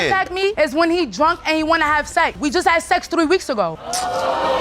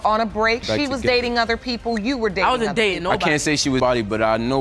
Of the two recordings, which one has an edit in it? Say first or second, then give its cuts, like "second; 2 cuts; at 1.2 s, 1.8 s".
first; 1 cut; at 2.4 s